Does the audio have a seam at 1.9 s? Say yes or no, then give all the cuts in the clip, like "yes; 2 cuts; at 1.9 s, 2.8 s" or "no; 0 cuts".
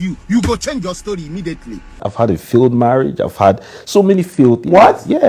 yes; 1 cut; at 1.9 s